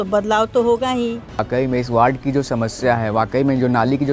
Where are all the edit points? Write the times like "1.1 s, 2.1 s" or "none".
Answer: 1.4 s